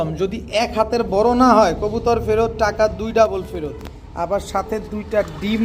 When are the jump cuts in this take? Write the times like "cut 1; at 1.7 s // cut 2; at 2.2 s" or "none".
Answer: none